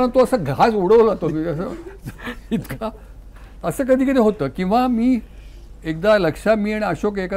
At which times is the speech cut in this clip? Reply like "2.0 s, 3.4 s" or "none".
none